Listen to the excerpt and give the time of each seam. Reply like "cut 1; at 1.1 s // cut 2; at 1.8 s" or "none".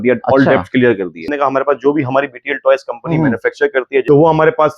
cut 1; at 1.3 s // cut 2; at 4.0 s